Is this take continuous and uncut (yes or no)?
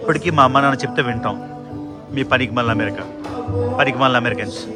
yes